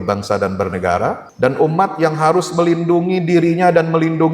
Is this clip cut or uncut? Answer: cut